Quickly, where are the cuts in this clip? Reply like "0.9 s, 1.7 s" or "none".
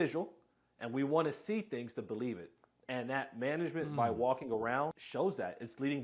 5.0 s